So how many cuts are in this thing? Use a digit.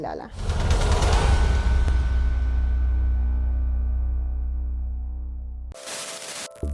1